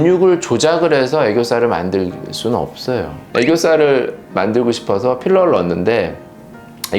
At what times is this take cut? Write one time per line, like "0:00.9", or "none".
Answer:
0:03.2